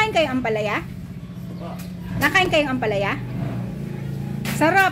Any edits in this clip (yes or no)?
no